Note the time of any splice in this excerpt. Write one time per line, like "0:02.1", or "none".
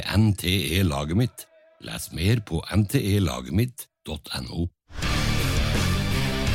0:05.0